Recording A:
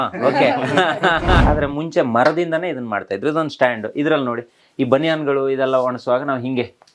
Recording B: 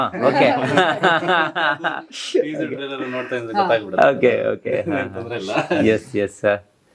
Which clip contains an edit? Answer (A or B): A